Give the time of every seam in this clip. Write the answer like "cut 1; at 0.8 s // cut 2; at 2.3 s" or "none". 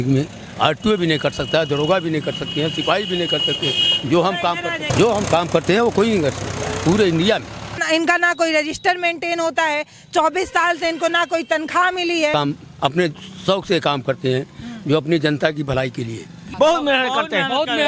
cut 1; at 4.9 s // cut 2; at 7.8 s // cut 3; at 12.3 s // cut 4; at 16.4 s